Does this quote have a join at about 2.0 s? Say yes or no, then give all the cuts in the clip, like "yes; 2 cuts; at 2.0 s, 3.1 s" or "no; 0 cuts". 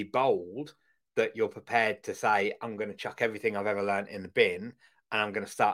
no; 0 cuts